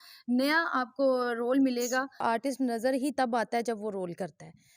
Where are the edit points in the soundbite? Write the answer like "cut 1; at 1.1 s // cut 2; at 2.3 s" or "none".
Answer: cut 1; at 2.2 s